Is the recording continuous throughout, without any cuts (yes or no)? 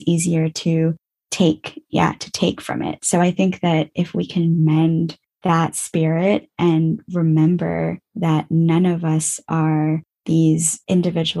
yes